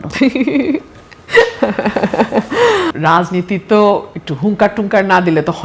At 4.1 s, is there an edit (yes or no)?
no